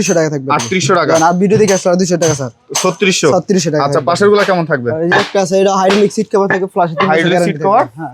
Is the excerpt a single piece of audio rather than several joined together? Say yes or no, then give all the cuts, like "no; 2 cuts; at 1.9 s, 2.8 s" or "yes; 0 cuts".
yes; 0 cuts